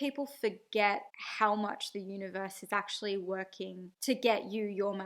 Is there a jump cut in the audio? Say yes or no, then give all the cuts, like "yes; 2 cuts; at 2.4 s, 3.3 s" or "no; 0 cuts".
no; 0 cuts